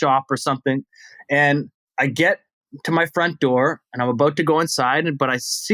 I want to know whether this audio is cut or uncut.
cut